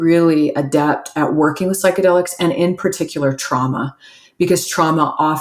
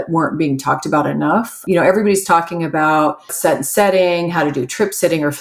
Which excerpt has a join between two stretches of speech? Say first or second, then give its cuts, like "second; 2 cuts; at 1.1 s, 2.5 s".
second; 2 cuts; at 1.6 s, 3.3 s